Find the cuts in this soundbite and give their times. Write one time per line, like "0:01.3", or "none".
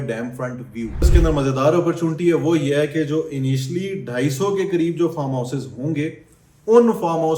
0:01.1